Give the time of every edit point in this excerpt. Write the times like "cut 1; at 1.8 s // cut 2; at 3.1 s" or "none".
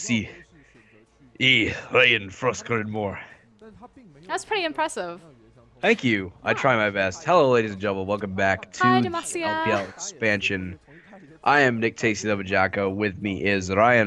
cut 1; at 12.1 s

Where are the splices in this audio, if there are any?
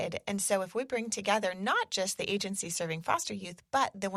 none

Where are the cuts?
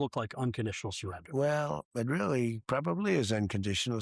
none

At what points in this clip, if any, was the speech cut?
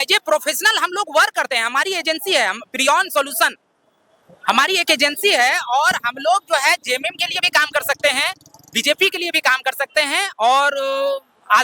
none

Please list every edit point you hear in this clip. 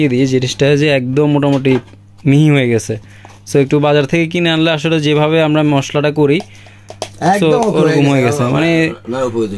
none

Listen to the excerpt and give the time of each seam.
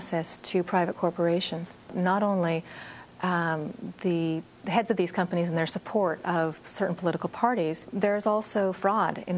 cut 1; at 1.9 s // cut 2; at 7.9 s

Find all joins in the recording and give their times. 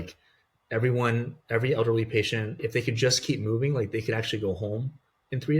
cut 1; at 2.6 s

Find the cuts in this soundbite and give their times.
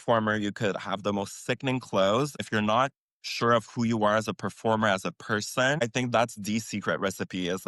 cut 1; at 2.4 s // cut 2; at 5.8 s

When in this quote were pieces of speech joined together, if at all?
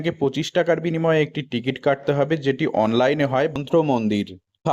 cut 1; at 3.6 s

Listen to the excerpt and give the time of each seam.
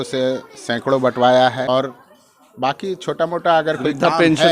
cut 1; at 1.7 s

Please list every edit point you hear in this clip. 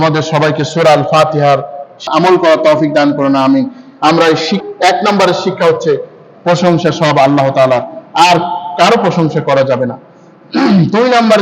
cut 1; at 2.1 s // cut 2; at 4.6 s

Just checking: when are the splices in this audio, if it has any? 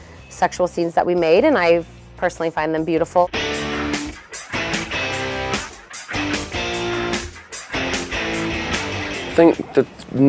none

